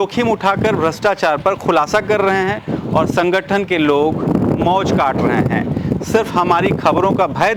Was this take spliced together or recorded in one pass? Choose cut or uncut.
uncut